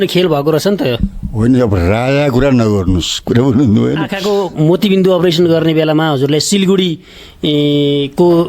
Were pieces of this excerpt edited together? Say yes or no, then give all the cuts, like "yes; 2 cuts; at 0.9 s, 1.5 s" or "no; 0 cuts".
yes; 1 cut; at 4.1 s